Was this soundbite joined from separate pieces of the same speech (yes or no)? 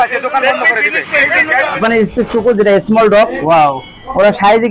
yes